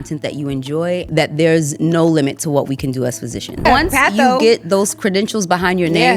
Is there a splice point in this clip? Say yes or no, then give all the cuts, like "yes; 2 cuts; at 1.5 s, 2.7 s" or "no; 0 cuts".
yes; 2 cuts; at 1.1 s, 3.6 s